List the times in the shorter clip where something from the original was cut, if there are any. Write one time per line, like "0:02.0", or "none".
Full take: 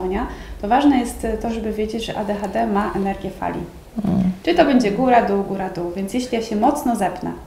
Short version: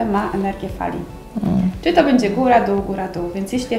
none